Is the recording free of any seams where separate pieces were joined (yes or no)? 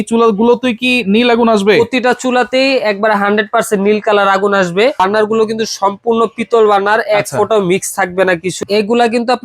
no